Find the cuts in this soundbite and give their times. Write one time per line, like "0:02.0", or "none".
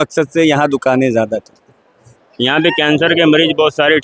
0:02.2